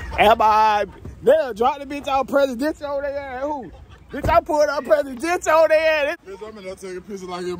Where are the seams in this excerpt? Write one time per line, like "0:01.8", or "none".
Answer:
0:06.2